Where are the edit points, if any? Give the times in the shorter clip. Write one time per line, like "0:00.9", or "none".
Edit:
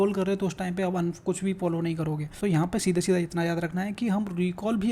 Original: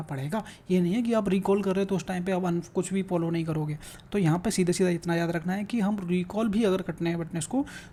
0:02.3